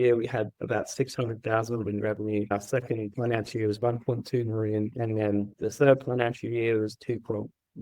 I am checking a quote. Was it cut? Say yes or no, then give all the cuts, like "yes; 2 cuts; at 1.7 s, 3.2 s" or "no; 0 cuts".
yes; 2 cuts; at 2.5 s, 5.5 s